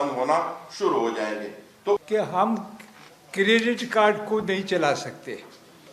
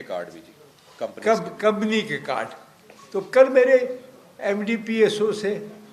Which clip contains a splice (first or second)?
first